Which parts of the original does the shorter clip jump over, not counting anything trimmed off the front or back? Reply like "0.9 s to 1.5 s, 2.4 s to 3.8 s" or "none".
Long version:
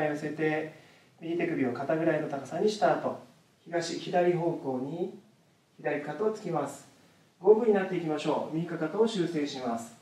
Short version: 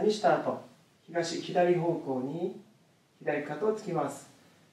none

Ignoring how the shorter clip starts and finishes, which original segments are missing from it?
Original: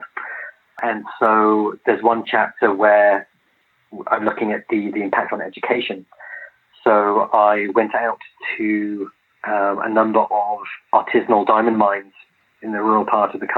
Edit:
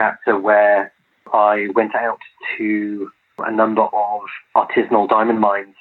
3.6 s to 7.3 s, 9.4 s to 9.8 s

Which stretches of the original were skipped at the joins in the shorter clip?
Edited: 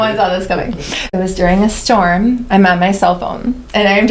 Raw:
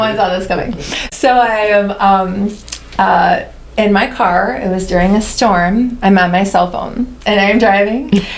1.1 s to 4.6 s

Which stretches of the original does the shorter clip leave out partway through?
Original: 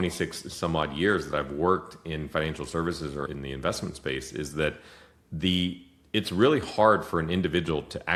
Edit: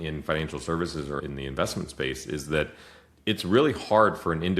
5.1 s to 5.9 s

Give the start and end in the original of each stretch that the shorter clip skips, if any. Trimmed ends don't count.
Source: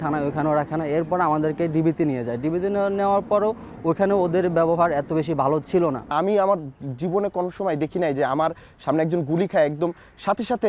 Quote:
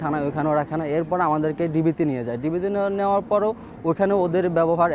none

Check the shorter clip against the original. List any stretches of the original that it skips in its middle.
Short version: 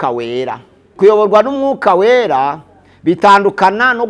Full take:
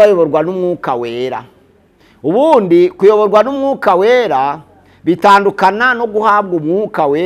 1.8 s to 2.9 s

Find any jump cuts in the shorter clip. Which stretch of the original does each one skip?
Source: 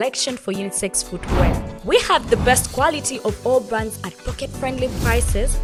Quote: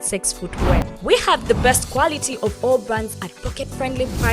1.6 s to 1.7 s

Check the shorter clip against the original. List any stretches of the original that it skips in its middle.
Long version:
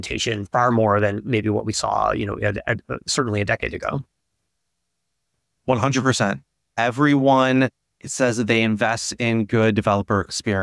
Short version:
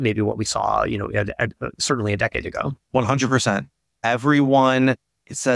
4.1 s to 5.5 s

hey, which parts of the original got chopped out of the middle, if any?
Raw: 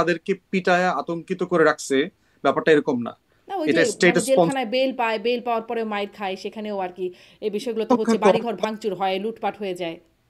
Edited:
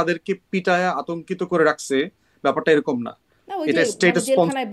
none

